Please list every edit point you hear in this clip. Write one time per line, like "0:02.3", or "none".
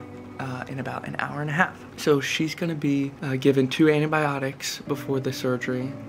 0:01.9
0:03.2